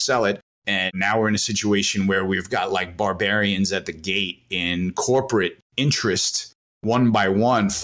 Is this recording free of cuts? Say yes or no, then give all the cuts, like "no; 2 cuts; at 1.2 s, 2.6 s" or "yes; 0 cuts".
no; 3 cuts; at 0.9 s, 5.6 s, 6.8 s